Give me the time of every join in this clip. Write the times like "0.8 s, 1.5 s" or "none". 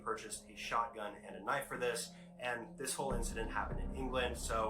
none